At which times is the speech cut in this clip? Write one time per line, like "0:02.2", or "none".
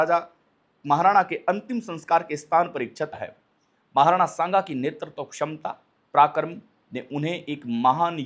0:03.1